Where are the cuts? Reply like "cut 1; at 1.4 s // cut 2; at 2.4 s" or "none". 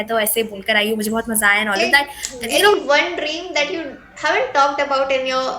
cut 1; at 2.7 s